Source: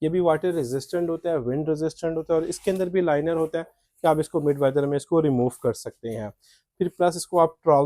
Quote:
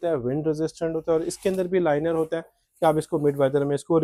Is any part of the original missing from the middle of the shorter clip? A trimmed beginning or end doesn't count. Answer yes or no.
no